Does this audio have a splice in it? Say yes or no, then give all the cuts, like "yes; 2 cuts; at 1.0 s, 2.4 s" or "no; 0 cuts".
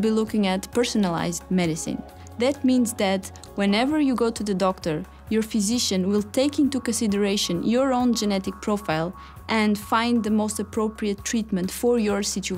no; 0 cuts